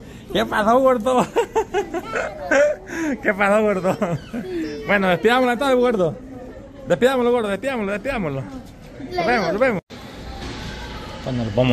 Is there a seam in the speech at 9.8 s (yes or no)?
yes